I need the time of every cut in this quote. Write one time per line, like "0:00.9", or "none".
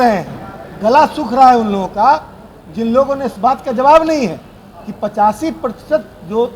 0:03.3